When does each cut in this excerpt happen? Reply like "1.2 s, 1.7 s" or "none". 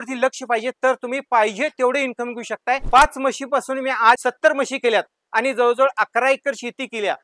none